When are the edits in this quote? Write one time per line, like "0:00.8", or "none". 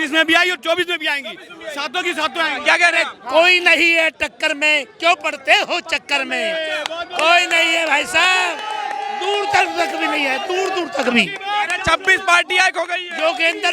none